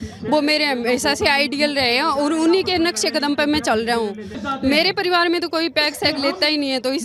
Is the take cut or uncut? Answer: cut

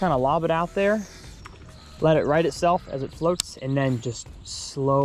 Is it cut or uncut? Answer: uncut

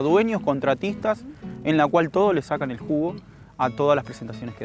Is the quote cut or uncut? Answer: uncut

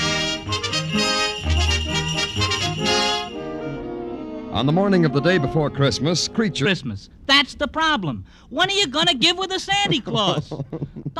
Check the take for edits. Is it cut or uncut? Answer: uncut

